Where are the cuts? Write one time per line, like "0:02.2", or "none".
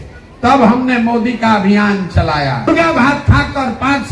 0:02.7